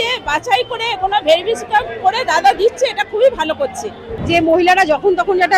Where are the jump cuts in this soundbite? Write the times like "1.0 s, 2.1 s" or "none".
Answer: 4.1 s